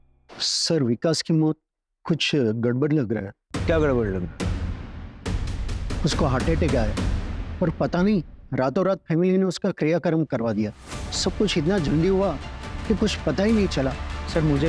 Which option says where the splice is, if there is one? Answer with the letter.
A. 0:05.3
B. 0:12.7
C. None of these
C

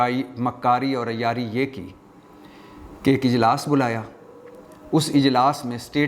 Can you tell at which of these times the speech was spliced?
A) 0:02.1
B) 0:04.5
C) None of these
C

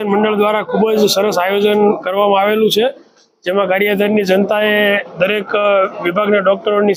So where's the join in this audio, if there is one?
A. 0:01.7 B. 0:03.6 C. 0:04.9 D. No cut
D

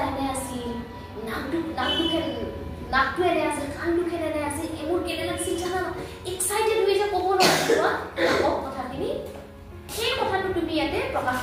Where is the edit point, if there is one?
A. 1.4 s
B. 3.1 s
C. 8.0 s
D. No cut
D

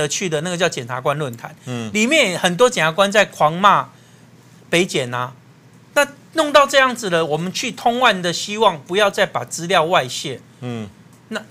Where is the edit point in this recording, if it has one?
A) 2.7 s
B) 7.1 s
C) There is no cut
C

